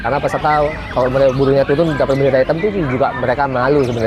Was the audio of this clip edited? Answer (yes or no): no